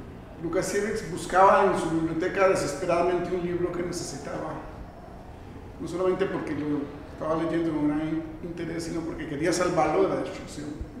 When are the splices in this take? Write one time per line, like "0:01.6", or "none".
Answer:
none